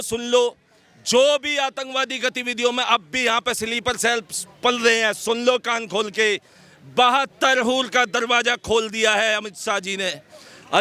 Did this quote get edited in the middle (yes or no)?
no